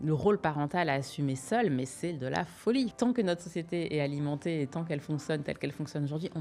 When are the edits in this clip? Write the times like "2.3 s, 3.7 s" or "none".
2.9 s